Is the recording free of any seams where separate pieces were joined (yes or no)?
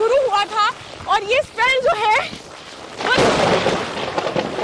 yes